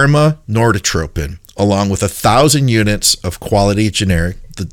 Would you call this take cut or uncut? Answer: uncut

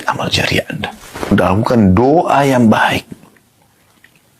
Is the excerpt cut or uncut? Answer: cut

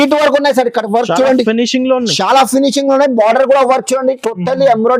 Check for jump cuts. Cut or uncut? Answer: uncut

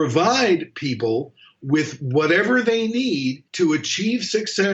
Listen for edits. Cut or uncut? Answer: cut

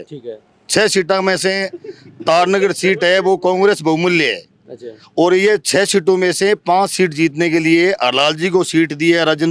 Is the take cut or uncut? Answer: uncut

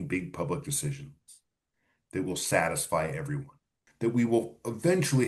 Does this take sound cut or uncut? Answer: cut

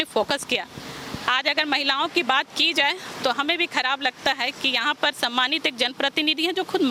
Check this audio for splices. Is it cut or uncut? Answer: uncut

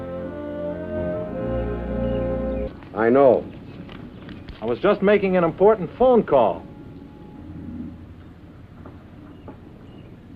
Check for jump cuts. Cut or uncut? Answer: uncut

